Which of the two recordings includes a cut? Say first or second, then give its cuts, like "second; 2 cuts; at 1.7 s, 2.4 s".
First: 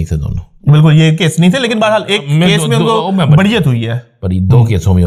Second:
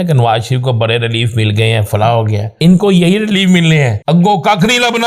second; 2 cuts; at 2.4 s, 4.0 s